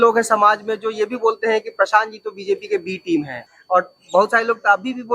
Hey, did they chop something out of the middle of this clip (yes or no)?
yes